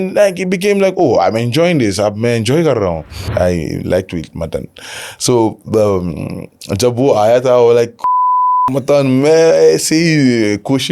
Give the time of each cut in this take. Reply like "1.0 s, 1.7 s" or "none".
3.2 s